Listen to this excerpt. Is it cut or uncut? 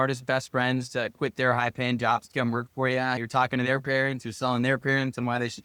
uncut